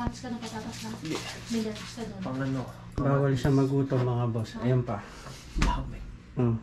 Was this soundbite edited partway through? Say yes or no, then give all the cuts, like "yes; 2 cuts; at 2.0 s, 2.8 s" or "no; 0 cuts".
no; 0 cuts